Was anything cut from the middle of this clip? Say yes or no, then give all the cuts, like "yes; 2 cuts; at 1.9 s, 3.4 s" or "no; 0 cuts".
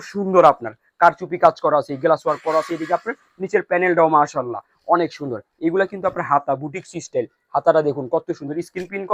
no; 0 cuts